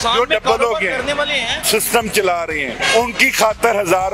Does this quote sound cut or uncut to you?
cut